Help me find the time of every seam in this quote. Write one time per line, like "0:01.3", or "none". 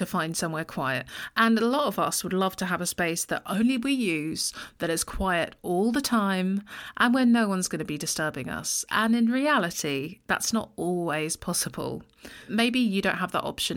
0:12.5